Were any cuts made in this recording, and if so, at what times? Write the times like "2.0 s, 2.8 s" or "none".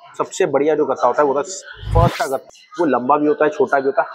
2.4 s